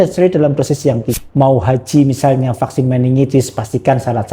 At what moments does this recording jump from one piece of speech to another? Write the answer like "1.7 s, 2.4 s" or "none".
1.2 s